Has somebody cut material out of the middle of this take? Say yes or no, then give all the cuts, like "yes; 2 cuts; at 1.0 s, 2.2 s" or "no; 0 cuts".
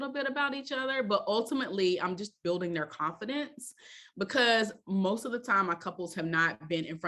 no; 0 cuts